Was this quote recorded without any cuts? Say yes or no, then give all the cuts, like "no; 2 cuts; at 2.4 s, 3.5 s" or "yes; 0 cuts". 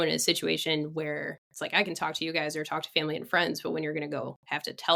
yes; 0 cuts